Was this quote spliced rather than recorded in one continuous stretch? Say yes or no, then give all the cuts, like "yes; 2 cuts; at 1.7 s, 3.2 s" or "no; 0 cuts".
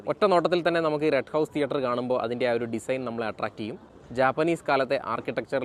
no; 0 cuts